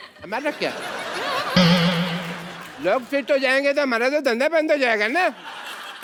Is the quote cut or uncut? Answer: uncut